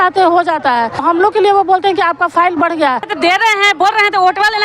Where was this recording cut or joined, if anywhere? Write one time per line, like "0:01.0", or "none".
0:01.0
0:03.1